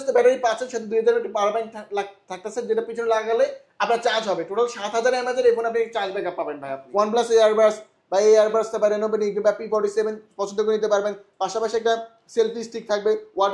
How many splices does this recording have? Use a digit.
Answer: 1